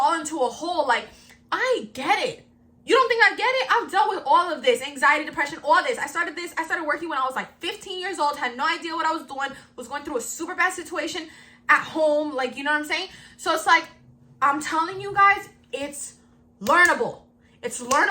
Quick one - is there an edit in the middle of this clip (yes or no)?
no